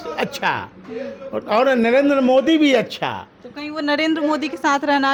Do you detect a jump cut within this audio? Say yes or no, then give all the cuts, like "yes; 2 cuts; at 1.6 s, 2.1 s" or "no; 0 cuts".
no; 0 cuts